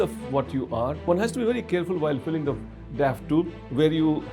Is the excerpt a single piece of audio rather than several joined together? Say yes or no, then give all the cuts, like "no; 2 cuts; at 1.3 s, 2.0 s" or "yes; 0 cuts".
no; 1 cut; at 1.1 s